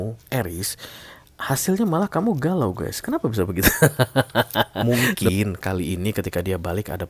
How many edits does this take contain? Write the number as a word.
one